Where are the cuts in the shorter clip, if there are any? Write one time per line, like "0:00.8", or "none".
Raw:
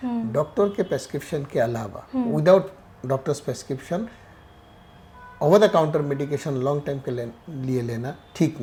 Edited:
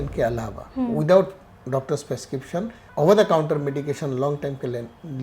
0:02.8